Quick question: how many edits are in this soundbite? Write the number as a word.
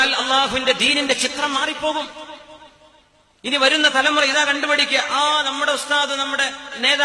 zero